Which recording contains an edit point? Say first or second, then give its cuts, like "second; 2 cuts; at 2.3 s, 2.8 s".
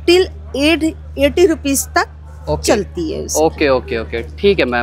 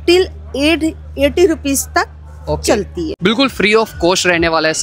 second; 1 cut; at 3.1 s